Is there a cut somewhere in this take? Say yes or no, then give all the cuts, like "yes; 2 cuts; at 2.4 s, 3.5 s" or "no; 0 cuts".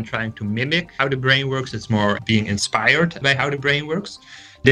yes; 3 cuts; at 1.0 s, 2.2 s, 3.2 s